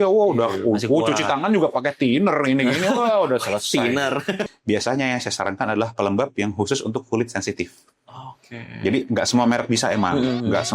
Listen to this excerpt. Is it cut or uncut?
cut